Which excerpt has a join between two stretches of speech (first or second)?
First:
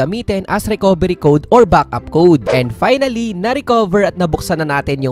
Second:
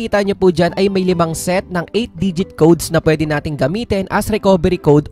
first